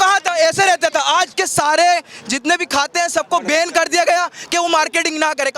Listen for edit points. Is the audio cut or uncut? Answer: cut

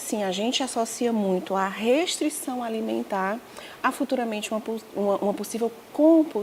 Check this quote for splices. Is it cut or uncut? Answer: uncut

